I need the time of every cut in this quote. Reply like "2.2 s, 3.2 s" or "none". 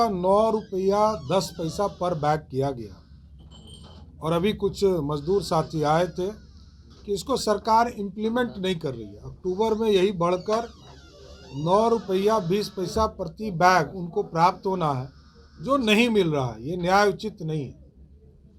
none